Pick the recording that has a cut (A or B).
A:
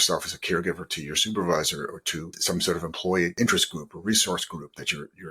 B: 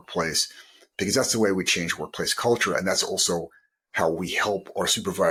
A